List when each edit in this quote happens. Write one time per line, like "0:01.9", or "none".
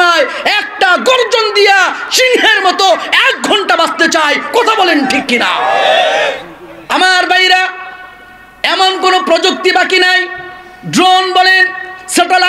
0:06.8